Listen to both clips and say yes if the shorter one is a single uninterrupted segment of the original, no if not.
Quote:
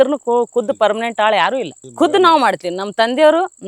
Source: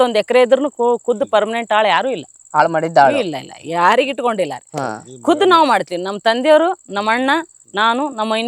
no